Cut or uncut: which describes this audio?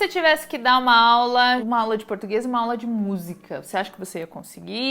cut